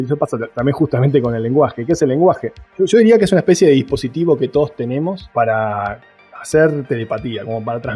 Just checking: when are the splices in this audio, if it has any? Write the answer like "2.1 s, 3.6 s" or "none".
5.2 s